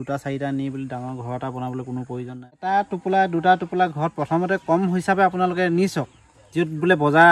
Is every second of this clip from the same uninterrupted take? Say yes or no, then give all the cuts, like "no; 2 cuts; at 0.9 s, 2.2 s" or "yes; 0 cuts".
no; 1 cut; at 2.5 s